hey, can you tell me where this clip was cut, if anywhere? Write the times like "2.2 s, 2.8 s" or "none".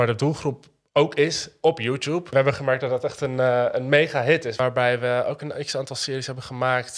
2.3 s, 4.6 s